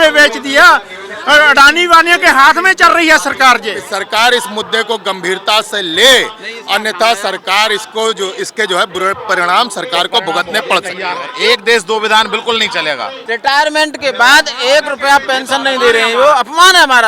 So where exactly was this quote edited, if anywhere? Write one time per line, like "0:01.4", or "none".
0:03.9
0:11.3
0:13.2